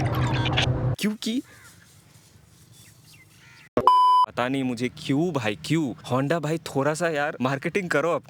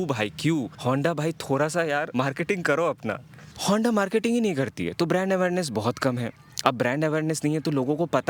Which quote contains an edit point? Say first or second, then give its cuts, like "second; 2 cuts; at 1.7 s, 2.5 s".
first; 2 cuts; at 1.0 s, 4.2 s